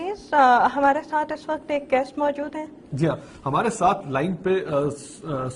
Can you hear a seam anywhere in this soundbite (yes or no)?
yes